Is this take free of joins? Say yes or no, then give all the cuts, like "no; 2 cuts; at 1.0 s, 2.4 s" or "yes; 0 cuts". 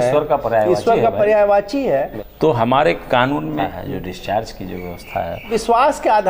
no; 3 cuts; at 2.2 s, 3.6 s, 5.4 s